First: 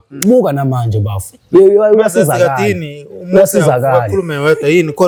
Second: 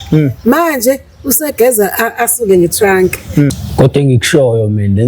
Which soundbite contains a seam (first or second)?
second